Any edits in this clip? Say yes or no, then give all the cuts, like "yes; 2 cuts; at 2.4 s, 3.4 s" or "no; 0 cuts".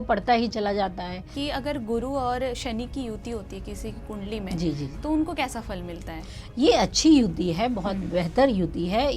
yes; 1 cut; at 1.3 s